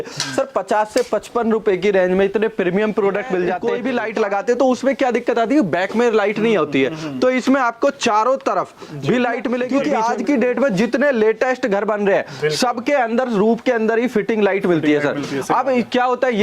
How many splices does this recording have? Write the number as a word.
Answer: two